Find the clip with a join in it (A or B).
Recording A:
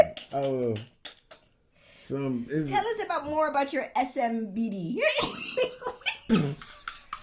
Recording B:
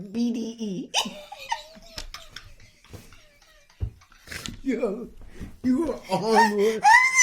B